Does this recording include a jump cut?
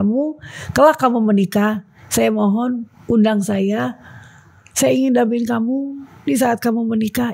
no; 0 cuts

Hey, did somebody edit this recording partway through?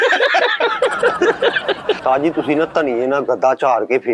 yes; 1 cut; at 2.0 s

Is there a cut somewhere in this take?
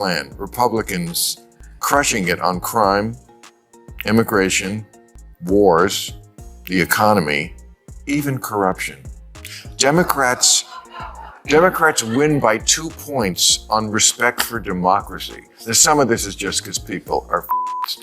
no; 0 cuts

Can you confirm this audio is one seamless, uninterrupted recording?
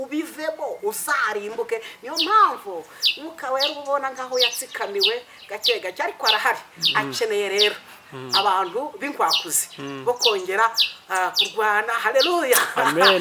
yes; 0 cuts

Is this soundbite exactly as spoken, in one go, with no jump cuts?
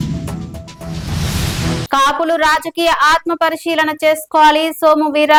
yes; 0 cuts

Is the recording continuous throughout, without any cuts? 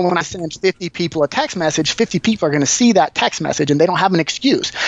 yes; 0 cuts

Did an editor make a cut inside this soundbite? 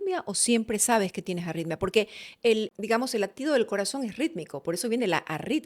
no; 0 cuts

